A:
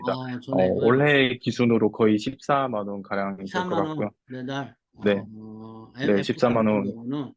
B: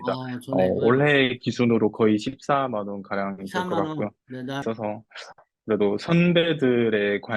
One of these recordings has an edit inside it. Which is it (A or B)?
B